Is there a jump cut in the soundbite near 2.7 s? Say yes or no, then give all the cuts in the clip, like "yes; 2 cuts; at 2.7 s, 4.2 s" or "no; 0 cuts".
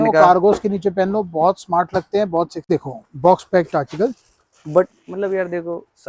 yes; 1 cut; at 2.7 s